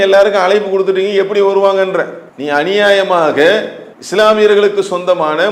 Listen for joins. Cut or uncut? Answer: uncut